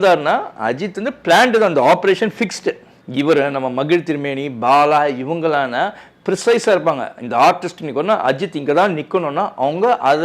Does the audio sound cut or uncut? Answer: cut